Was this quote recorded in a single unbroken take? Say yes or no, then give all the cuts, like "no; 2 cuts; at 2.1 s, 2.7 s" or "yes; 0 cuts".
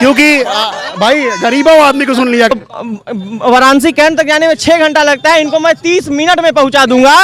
no; 1 cut; at 2.5 s